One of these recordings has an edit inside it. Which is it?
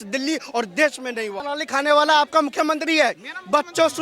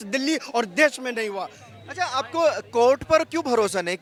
first; 1 cut; at 1.4 s

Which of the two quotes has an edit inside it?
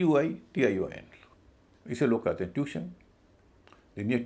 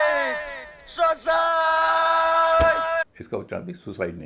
second; 1 cut; at 3.2 s

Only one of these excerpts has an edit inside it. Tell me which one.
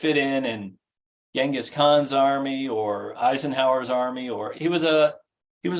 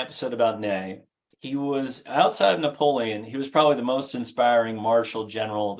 first; 2 cuts; at 3.1 s, 4.5 s

